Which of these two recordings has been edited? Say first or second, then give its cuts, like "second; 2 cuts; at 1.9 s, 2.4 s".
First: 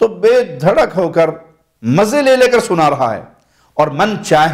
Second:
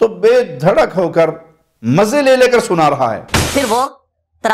second; 1 cut; at 3.5 s